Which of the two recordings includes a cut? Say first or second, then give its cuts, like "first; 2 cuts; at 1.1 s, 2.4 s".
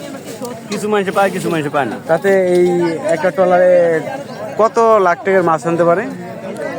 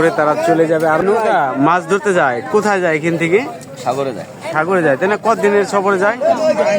second; 1 cut; at 1.0 s